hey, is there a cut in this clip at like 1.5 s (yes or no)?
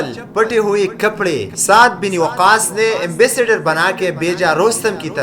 yes